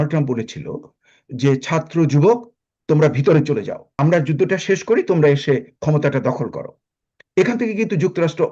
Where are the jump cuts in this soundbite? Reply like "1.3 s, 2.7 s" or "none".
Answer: 4.0 s